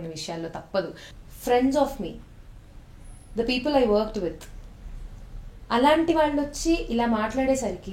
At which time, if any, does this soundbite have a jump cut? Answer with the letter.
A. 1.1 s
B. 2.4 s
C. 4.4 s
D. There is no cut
A